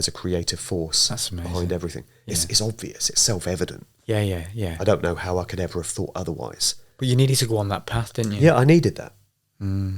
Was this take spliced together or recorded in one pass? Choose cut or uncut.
uncut